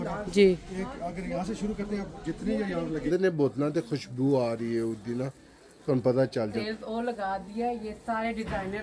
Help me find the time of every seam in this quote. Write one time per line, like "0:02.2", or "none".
0:03.1
0:06.6